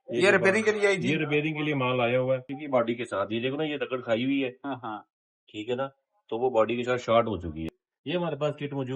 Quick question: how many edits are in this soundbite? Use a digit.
2